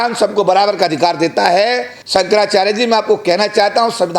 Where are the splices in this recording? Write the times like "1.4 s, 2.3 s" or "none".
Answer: 1.9 s